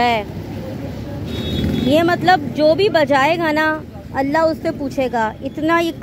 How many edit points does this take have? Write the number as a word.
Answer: zero